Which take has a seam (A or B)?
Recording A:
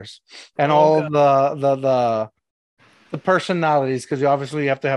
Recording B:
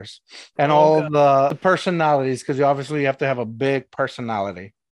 B